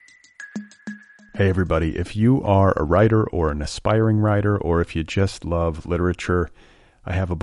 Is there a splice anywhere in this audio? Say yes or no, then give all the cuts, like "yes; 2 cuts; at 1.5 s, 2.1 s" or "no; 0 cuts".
yes; 1 cut; at 0.9 s